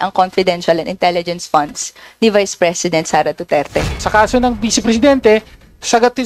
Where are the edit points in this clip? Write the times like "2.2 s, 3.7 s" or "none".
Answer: 4.0 s

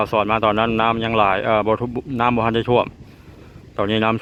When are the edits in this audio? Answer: none

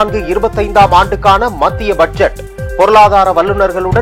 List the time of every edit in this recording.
none

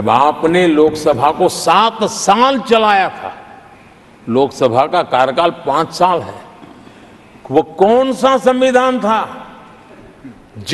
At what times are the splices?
none

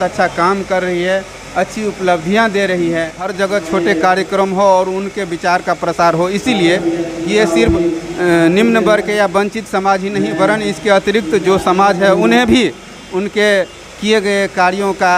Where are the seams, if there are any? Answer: 3.2 s

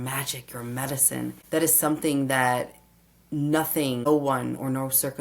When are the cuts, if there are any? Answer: 1.4 s, 4.0 s

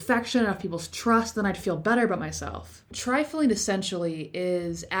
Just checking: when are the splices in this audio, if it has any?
3.0 s

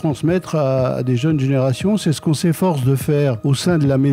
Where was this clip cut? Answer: none

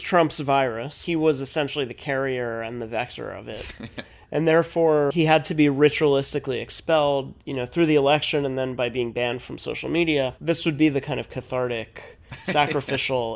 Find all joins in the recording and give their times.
1.0 s, 5.1 s, 10.4 s

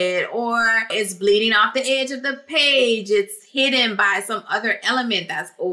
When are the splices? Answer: 0.9 s

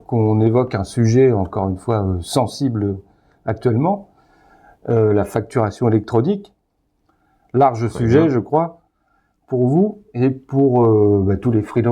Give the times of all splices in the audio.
none

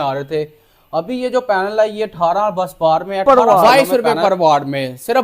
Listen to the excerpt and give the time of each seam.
3.2 s

